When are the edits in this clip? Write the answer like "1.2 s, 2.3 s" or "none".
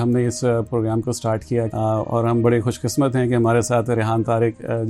1.7 s